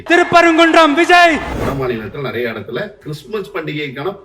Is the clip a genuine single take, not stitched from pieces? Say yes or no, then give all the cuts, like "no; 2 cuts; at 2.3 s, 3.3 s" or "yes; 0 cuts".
no; 1 cut; at 1.5 s